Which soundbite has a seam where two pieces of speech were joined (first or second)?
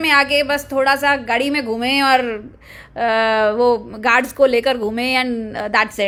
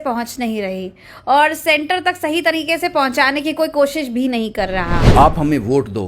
second